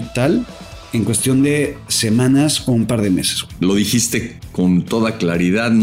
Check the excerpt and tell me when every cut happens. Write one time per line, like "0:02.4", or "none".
0:03.4